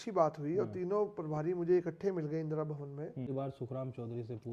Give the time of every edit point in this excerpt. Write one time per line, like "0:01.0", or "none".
0:03.3